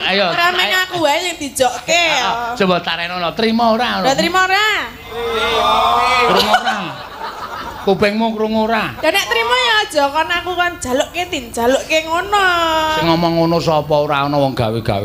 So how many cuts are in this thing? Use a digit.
0